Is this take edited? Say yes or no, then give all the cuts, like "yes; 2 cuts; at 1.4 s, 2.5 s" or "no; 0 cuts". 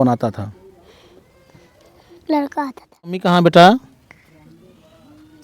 yes; 1 cut; at 3.2 s